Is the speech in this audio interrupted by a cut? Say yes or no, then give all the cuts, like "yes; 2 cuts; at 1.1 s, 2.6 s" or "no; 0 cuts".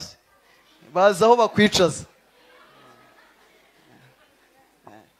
no; 0 cuts